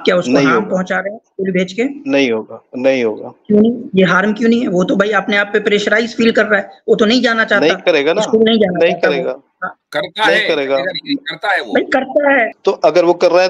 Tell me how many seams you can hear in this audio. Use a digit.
1